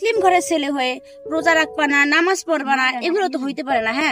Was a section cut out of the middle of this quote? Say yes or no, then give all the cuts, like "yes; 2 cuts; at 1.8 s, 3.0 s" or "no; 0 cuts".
no; 0 cuts